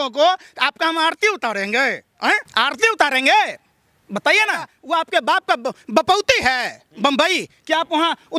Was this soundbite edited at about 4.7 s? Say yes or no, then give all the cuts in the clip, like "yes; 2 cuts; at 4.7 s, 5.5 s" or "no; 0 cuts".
yes; 2 cuts; at 2.5 s, 4.7 s